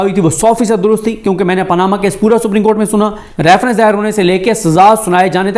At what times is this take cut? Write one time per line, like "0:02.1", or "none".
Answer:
0:03.2